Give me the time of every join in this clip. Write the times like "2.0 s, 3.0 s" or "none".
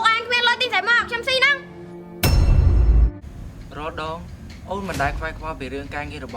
3.2 s